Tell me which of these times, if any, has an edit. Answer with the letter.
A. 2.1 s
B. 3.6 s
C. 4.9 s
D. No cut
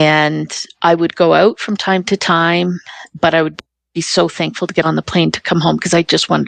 D